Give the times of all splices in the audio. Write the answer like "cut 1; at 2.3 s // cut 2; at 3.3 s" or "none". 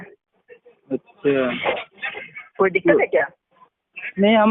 none